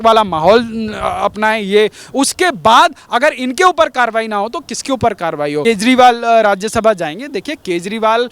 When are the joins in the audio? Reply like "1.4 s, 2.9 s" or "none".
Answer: 5.6 s